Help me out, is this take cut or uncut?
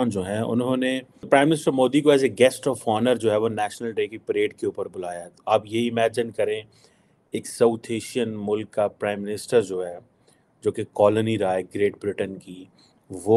cut